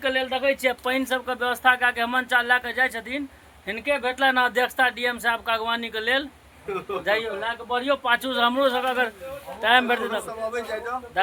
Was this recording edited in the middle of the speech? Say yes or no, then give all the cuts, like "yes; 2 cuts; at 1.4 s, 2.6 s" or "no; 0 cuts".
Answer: no; 0 cuts